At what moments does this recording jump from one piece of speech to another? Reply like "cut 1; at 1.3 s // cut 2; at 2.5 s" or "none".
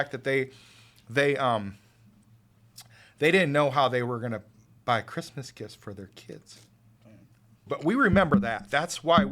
cut 1; at 7.6 s